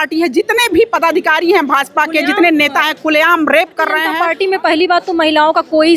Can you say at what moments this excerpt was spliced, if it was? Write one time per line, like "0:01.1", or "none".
0:04.2